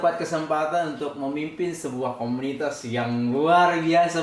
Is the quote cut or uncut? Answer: uncut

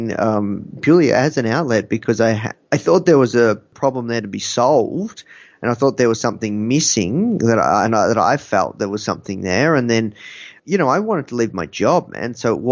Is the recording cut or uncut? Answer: cut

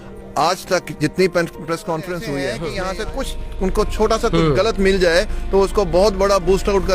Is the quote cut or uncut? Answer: cut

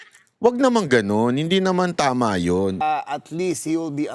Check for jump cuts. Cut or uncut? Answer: cut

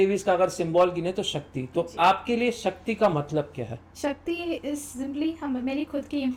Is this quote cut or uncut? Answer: uncut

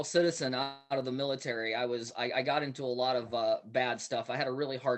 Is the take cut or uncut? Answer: uncut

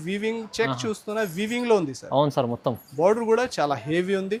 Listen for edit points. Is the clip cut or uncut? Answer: uncut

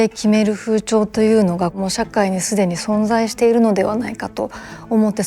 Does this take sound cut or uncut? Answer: cut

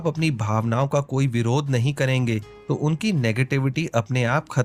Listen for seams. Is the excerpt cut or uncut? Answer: uncut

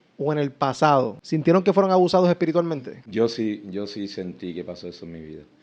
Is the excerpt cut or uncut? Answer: cut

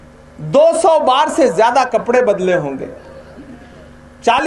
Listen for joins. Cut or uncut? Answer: uncut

